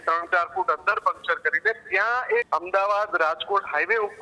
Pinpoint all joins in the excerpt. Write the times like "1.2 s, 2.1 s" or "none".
2.5 s